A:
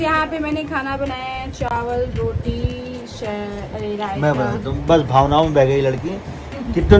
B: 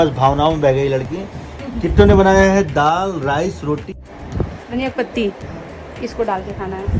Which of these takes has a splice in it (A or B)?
B